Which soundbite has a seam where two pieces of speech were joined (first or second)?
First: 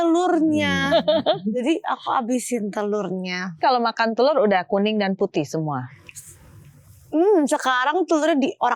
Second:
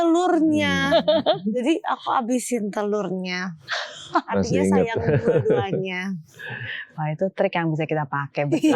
first